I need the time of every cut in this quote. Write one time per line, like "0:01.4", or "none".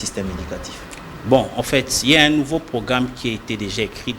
none